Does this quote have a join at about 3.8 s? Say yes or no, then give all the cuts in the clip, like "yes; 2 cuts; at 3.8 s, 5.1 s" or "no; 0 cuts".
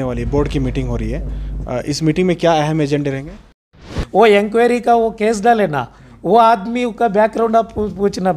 yes; 1 cut; at 3.8 s